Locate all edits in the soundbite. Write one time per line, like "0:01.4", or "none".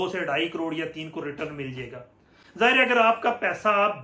none